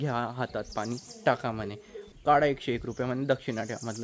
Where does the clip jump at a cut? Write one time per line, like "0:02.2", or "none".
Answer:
0:02.1